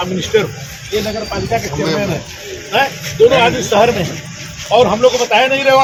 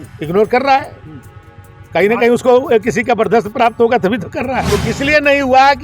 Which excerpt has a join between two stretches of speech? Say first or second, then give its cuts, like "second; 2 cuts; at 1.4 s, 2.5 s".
second; 1 cut; at 4.8 s